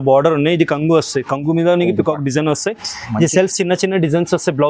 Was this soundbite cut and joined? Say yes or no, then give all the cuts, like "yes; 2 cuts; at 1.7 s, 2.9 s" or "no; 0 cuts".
no; 0 cuts